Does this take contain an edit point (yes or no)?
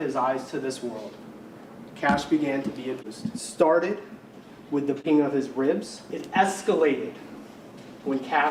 yes